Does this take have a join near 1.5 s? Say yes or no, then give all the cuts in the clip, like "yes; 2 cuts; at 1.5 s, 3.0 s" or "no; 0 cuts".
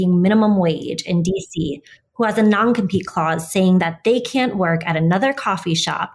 no; 0 cuts